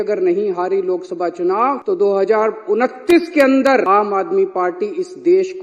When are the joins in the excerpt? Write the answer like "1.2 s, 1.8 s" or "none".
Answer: 1.8 s, 3.9 s